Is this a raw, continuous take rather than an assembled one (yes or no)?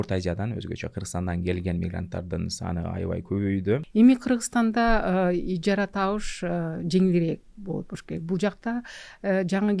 no